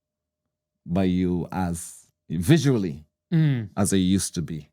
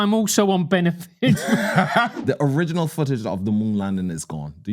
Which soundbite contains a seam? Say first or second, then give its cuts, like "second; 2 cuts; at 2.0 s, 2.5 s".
second; 1 cut; at 2.1 s